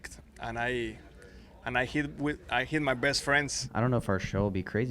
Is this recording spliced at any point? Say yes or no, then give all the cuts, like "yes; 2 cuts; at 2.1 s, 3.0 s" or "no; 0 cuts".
yes; 1 cut; at 3.6 s